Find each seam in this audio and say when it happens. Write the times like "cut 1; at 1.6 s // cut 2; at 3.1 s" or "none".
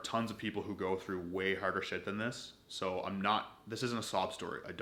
none

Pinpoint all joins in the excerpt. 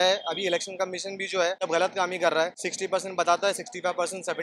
cut 1; at 1.6 s // cut 2; at 2.6 s

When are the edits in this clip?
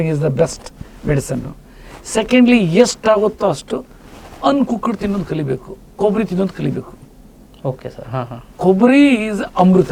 none

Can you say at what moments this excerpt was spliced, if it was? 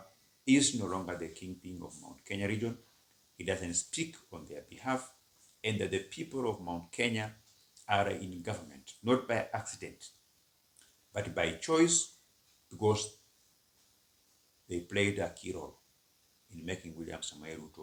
none

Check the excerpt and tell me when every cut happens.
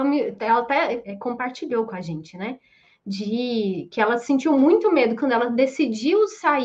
cut 1; at 1.1 s

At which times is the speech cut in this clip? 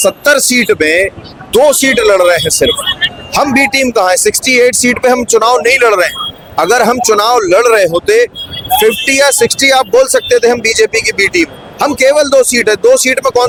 none

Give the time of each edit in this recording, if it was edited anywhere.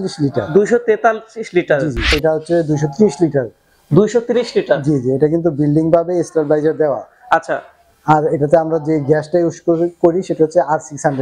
cut 1; at 2.1 s

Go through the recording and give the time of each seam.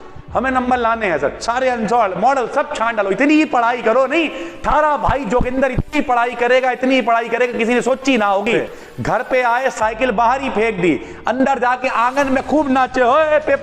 cut 1; at 8.6 s

